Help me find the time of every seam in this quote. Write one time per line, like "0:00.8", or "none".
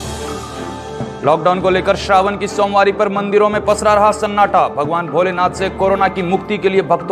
0:00.9